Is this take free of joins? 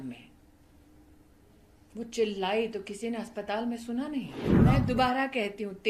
no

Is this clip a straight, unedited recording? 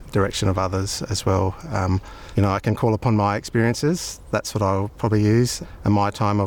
yes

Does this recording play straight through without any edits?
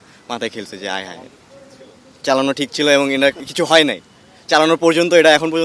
yes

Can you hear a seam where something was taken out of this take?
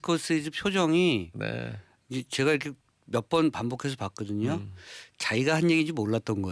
no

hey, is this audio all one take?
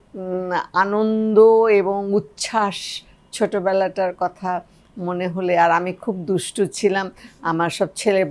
yes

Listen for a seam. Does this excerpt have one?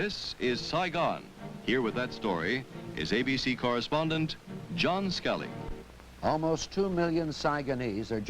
yes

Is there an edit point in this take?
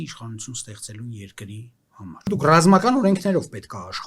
yes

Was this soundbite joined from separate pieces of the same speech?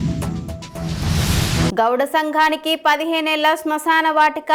no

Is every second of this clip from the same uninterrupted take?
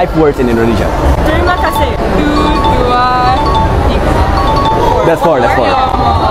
yes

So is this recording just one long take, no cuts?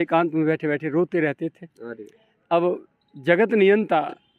yes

